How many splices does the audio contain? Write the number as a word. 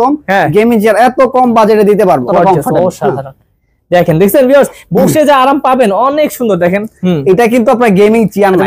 one